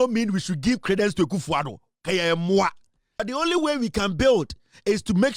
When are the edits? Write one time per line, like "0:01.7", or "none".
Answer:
0:03.2